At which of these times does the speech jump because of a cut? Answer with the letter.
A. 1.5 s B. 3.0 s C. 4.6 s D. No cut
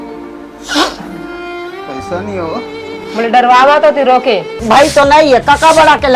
C